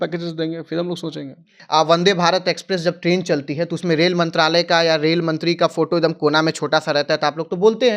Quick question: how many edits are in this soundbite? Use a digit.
1